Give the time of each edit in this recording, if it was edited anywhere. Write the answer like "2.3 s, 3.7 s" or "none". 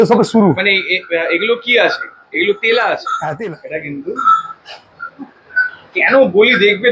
3.4 s